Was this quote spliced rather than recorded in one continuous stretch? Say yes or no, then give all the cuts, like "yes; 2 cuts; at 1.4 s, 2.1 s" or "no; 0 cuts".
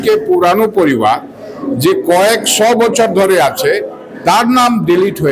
no; 0 cuts